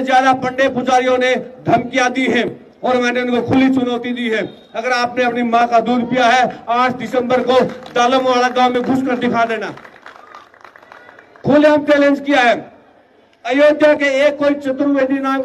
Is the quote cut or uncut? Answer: uncut